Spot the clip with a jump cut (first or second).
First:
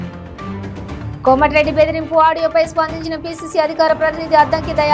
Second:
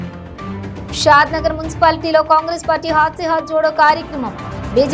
second